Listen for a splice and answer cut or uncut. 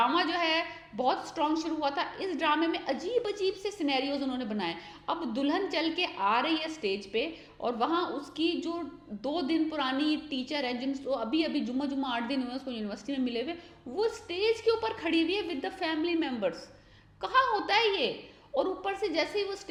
uncut